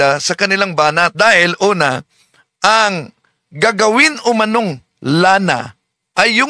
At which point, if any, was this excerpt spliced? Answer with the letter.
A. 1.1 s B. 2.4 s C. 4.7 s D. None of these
A